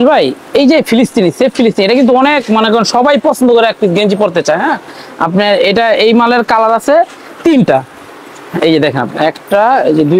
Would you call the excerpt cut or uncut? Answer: uncut